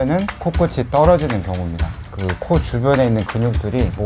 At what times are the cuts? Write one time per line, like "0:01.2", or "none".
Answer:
0:02.0